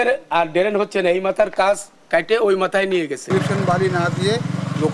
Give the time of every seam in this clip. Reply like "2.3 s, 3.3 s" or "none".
3.3 s